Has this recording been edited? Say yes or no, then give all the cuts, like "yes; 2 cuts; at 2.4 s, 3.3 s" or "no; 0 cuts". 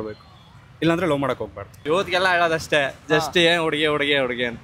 yes; 1 cut; at 1.8 s